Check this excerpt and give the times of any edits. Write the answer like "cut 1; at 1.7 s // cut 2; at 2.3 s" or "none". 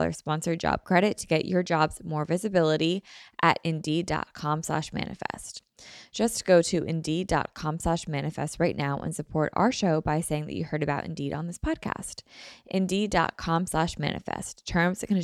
none